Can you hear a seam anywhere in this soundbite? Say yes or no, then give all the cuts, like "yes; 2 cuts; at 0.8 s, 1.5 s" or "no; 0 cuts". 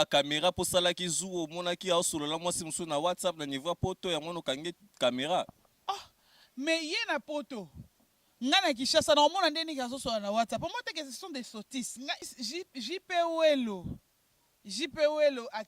yes; 1 cut; at 12.2 s